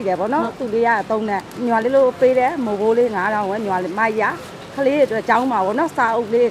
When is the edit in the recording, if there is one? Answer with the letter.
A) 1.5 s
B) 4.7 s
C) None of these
A